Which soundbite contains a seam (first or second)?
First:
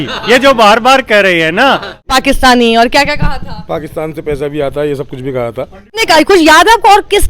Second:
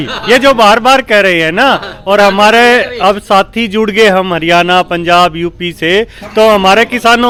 first